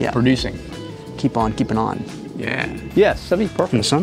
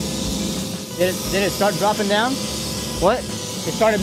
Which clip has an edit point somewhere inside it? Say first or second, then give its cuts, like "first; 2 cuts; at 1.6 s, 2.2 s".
first; 1 cut; at 2.7 s